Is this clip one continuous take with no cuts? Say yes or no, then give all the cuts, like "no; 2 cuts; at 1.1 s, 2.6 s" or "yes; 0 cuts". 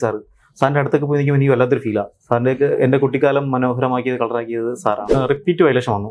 no; 1 cut; at 5.1 s